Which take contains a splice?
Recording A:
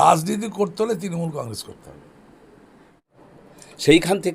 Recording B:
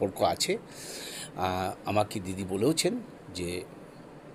A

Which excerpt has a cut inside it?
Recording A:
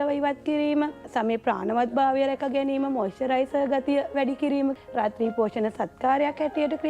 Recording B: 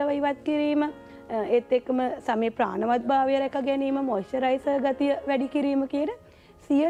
A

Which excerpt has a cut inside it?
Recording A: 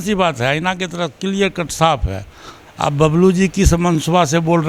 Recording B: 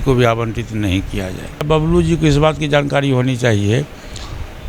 B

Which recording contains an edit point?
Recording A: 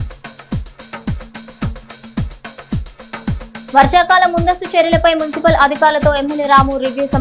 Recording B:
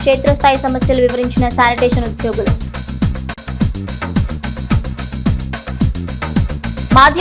A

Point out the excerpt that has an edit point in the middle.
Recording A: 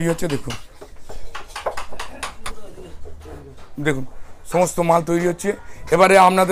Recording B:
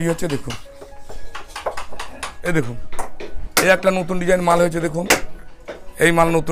B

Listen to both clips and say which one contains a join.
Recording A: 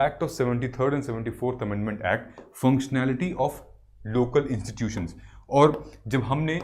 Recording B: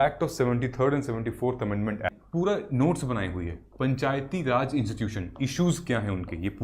B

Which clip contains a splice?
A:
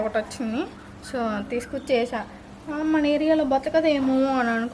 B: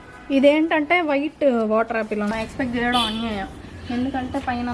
B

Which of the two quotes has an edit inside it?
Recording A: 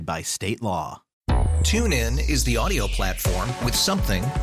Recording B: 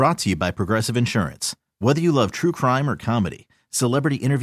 A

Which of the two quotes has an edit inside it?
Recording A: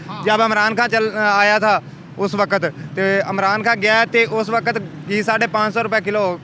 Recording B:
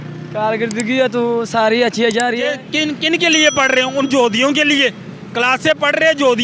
B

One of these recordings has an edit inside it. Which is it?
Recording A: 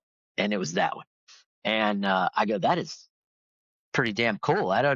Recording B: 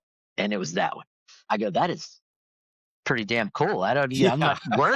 B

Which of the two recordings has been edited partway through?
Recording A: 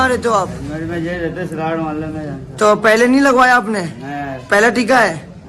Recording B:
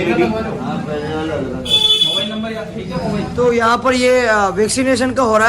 B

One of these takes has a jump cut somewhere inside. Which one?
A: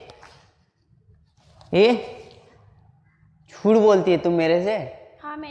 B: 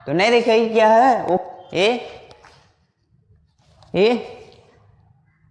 B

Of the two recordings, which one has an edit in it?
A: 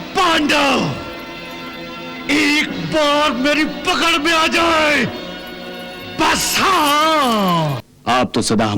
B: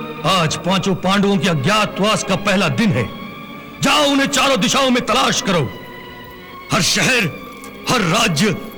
A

